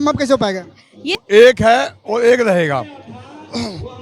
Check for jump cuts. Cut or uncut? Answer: cut